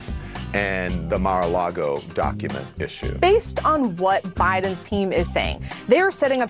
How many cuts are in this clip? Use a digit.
1